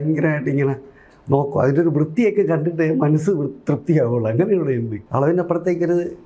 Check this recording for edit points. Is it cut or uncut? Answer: cut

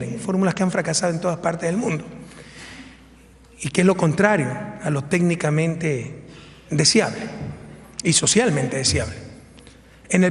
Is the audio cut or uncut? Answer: uncut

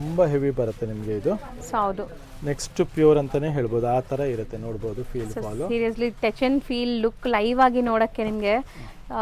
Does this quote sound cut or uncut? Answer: uncut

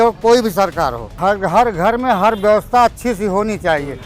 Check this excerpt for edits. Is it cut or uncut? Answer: cut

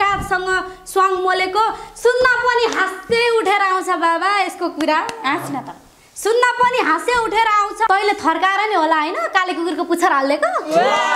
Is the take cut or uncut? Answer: cut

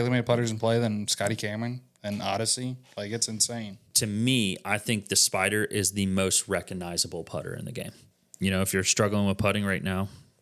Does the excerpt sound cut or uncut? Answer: cut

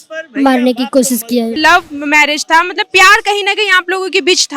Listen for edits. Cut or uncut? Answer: cut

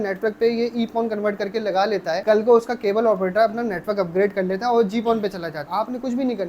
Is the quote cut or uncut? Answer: cut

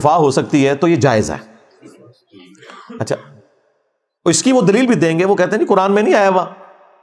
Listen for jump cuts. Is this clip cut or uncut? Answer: uncut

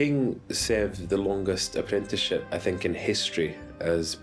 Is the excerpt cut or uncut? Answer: uncut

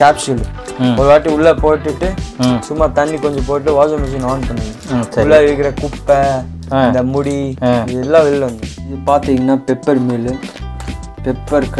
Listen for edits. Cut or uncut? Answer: cut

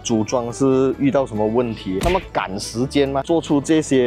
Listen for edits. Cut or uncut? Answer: uncut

